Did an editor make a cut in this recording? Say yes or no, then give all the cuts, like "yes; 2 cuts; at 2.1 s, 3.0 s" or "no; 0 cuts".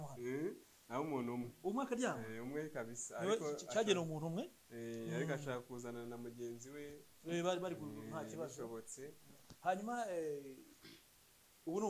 no; 0 cuts